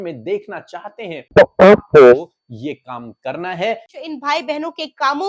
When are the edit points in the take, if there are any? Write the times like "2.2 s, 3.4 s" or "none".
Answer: 1.3 s, 3.9 s